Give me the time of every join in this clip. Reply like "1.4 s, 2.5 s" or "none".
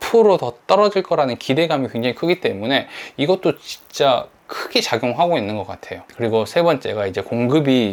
none